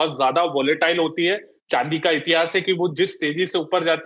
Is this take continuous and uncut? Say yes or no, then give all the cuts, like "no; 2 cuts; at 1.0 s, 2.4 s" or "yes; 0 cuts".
yes; 0 cuts